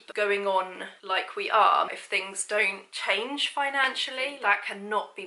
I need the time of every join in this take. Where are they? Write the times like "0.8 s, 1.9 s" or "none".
1.9 s, 4.3 s